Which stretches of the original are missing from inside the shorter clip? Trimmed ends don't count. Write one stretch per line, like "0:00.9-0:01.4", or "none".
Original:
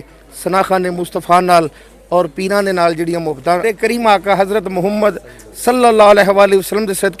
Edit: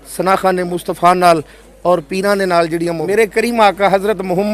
0:03.4-0:03.6

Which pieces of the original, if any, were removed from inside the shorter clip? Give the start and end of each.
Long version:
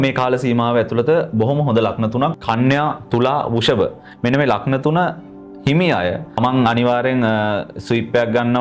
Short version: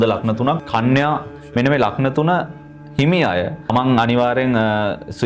0:03.0-0:04.0

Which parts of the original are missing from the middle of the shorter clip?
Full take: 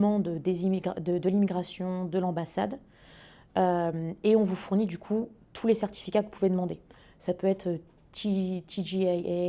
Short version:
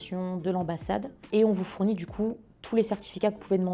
0:02.9-0:04.1

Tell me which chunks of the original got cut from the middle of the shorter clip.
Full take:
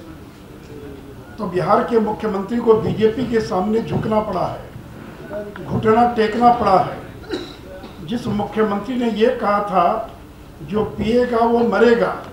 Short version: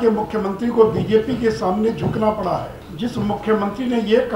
0:04.7-0:07.9

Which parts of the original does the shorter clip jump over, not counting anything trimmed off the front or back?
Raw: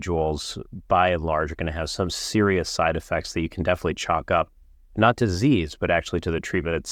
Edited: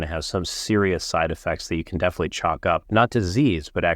0:04.5-0:04.9

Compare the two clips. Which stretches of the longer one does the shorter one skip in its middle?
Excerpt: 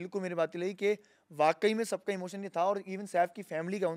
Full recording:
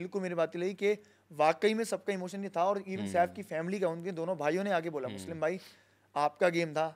none

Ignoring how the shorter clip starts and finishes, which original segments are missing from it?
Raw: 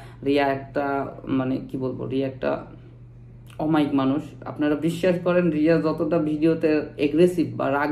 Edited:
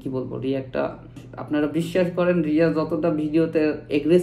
0:03.0-0:04.4

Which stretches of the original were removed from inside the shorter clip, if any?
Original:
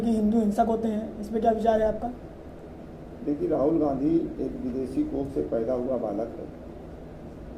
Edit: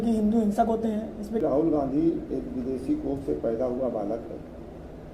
0:01.4-0:03.5

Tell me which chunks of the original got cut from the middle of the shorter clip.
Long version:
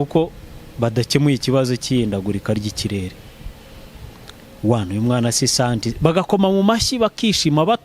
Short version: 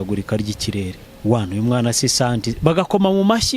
0:03.2-0:04.4

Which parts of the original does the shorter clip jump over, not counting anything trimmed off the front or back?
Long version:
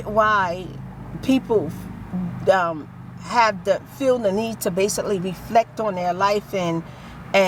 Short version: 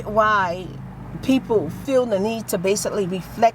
0:01.8-0:03.9

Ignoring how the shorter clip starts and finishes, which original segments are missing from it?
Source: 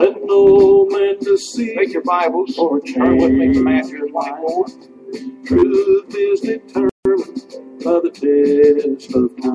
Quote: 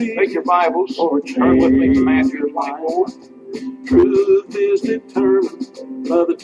0:06.9-0:07.1

